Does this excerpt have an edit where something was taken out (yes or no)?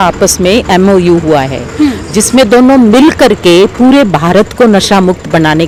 no